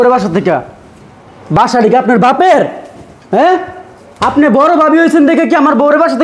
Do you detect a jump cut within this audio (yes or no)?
no